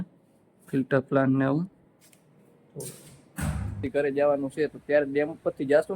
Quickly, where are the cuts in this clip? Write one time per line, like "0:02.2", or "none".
0:03.8